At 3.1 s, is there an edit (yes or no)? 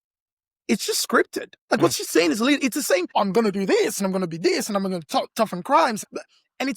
yes